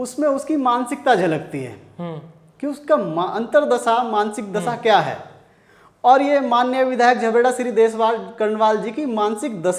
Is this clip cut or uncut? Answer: uncut